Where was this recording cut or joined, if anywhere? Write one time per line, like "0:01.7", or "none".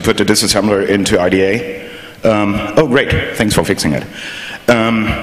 none